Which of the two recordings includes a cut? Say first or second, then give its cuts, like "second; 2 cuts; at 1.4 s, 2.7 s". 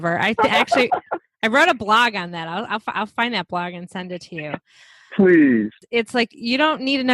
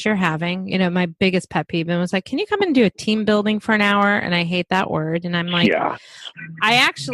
first; 1 cut; at 5.8 s